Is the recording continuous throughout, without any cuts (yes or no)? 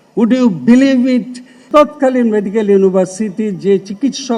no